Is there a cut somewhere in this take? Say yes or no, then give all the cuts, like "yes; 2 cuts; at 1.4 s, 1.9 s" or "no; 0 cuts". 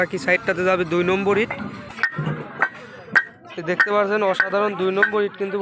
yes; 1 cut; at 2.0 s